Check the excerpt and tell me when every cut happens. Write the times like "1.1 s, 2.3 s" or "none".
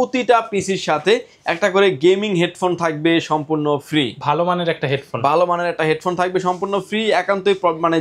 none